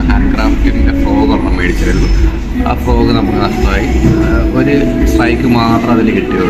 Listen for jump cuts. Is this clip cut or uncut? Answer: uncut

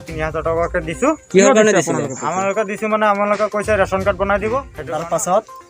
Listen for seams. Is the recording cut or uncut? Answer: cut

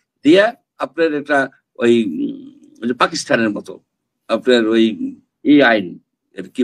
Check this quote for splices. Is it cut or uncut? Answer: uncut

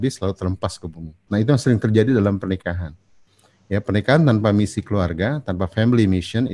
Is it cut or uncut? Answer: cut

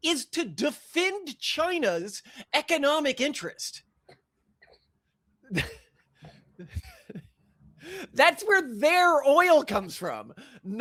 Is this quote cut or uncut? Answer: uncut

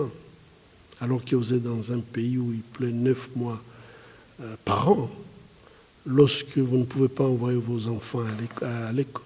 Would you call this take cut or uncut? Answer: uncut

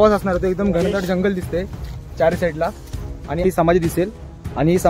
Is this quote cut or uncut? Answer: cut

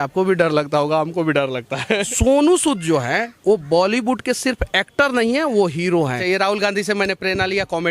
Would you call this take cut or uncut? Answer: cut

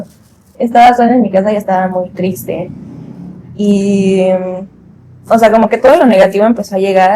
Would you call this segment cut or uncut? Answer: uncut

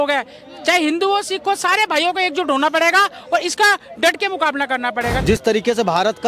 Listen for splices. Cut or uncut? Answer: cut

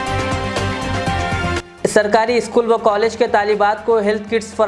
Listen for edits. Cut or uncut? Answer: cut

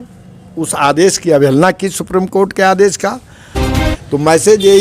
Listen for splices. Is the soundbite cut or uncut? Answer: cut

